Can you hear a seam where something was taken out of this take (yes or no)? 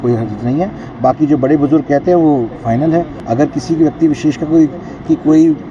yes